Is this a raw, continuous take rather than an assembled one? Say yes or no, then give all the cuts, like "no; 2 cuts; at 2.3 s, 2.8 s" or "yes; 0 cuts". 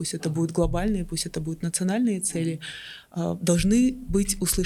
yes; 0 cuts